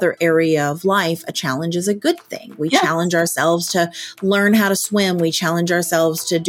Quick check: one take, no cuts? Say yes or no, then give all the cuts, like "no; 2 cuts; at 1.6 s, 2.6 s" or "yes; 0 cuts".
yes; 0 cuts